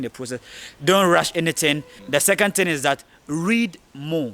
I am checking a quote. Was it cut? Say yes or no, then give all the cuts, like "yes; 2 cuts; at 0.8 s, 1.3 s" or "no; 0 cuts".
yes; 1 cut; at 1.9 s